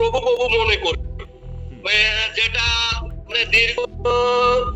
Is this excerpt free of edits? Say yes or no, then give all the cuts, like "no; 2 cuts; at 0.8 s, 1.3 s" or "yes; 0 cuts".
yes; 0 cuts